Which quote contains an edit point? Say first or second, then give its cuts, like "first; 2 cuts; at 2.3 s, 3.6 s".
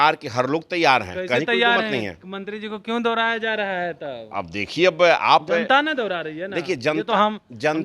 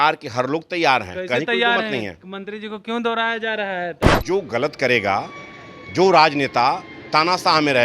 second; 1 cut; at 4.1 s